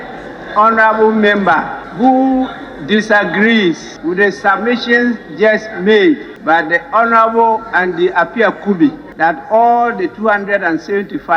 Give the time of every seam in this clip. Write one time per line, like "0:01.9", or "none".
0:01.8
0:03.9
0:06.3
0:09.1